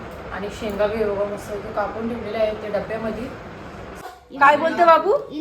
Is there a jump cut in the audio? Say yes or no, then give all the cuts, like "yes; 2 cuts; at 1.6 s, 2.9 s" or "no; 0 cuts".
yes; 1 cut; at 4.1 s